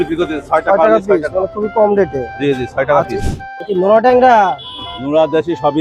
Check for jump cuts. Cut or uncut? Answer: cut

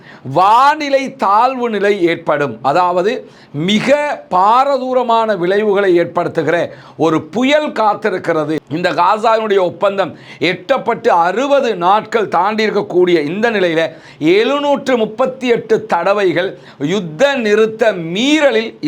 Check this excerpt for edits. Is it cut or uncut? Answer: cut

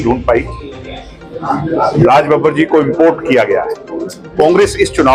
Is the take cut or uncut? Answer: uncut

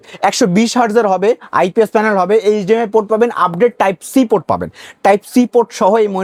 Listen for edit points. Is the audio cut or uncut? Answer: uncut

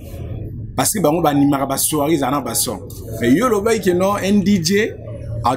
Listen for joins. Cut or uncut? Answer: uncut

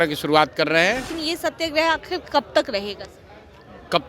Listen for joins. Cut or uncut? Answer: cut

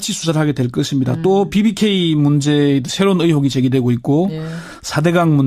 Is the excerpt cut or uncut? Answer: cut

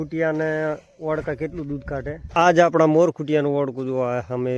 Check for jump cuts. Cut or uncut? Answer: cut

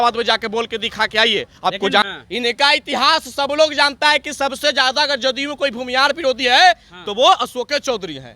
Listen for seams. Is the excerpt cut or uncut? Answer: cut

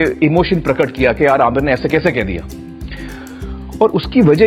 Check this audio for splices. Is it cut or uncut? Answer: uncut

